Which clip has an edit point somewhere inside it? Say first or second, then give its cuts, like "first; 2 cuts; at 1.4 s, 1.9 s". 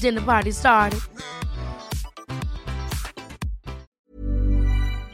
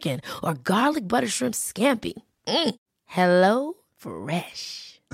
first; 1 cut; at 3.9 s